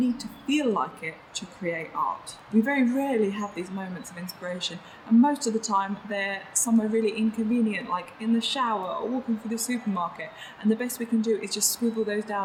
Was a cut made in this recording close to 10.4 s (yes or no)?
no